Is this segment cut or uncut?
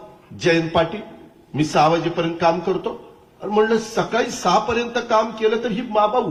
uncut